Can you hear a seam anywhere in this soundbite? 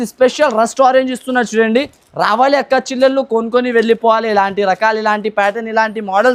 no; 0 cuts

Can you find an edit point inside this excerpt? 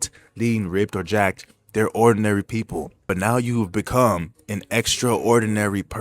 yes; 1 cut; at 3.1 s

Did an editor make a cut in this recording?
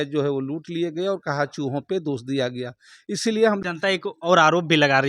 yes; 1 cut; at 3.6 s

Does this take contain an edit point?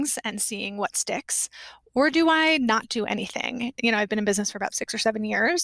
yes; 2 cuts; at 3.8 s, 4.8 s

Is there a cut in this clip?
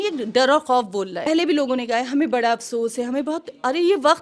yes; 1 cut; at 1.3 s

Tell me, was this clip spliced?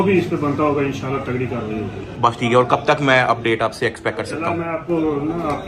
no; 0 cuts

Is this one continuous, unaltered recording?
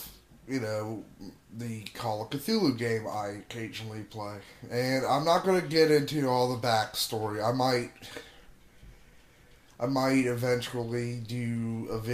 no; 1 cut; at 10.9 s

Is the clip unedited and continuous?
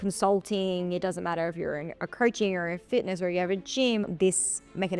no; 1 cut; at 4.0 s

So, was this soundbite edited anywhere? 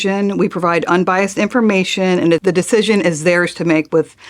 yes; 1 cut; at 2.4 s

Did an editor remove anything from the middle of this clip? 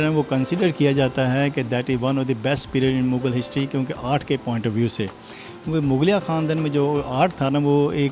no; 0 cuts

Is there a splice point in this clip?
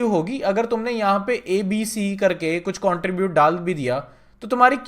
no; 0 cuts

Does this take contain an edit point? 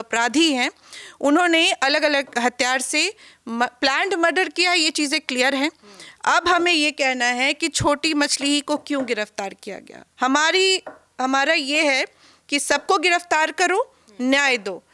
no; 0 cuts

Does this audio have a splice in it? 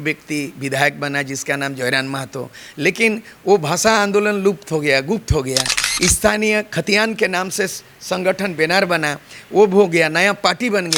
no; 0 cuts

